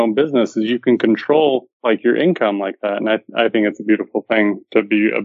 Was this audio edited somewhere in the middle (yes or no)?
yes